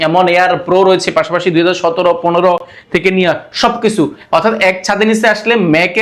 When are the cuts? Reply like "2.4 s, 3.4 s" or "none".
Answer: none